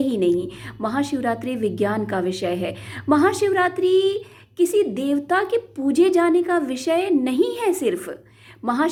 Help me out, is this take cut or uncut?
uncut